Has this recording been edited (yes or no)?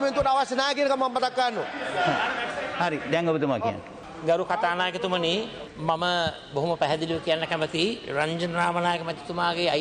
no